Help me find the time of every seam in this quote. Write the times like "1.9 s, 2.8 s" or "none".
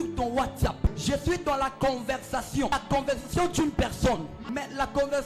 1.0 s, 2.7 s, 4.4 s